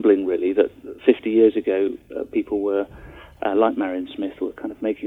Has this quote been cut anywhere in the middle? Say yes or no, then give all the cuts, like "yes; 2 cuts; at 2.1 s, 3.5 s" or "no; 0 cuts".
no; 0 cuts